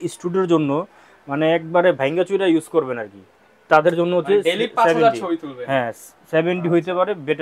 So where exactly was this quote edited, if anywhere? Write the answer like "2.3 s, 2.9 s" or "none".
none